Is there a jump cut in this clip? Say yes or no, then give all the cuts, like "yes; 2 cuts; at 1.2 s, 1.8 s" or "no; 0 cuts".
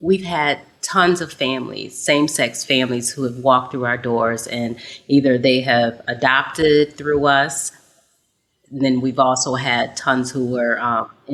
no; 0 cuts